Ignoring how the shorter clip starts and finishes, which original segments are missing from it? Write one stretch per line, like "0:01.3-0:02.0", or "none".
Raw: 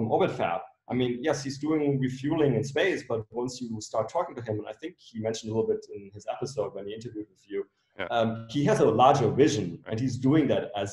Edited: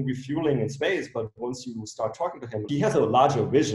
0:04.6-0:08.5